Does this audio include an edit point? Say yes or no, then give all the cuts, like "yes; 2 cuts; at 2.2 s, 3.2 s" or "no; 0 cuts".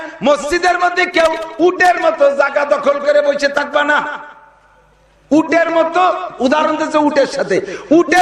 no; 0 cuts